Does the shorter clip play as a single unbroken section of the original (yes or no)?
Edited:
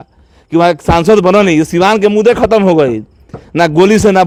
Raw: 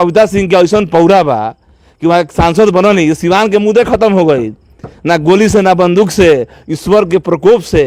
yes